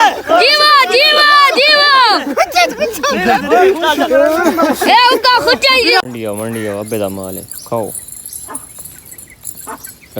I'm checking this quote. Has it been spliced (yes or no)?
yes